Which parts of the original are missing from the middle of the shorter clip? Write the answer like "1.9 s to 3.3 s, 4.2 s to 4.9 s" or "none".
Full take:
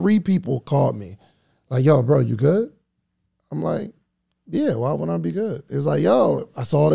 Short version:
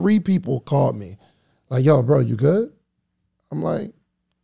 none